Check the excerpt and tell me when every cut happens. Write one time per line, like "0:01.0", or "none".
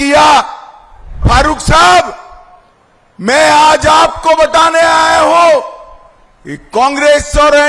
0:01.2